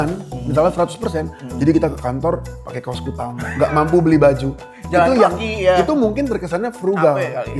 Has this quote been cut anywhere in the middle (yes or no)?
no